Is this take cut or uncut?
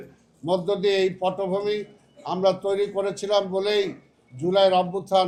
uncut